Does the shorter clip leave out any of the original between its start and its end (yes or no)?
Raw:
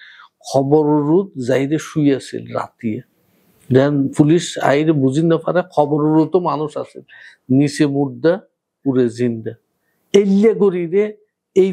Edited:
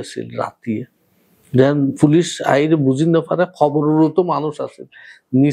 no